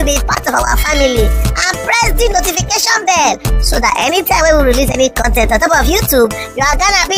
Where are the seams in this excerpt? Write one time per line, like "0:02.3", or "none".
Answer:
none